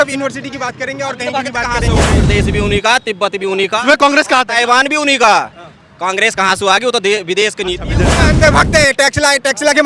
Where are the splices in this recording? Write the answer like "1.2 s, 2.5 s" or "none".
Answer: 2.2 s, 8.2 s